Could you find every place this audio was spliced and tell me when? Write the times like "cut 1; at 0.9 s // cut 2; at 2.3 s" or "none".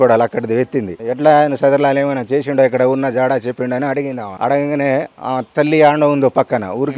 cut 1; at 1.0 s // cut 2; at 4.3 s

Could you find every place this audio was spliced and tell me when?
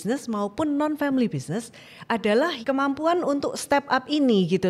cut 1; at 2.6 s

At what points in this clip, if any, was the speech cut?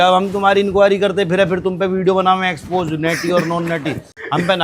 none

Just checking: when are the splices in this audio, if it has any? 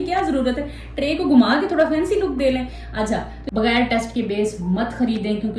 cut 1; at 3.4 s

